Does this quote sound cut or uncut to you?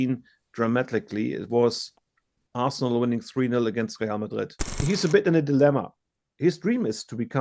cut